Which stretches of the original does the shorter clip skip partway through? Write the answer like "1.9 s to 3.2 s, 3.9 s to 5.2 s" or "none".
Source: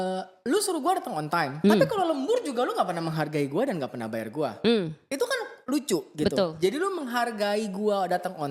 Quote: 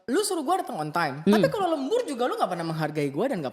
none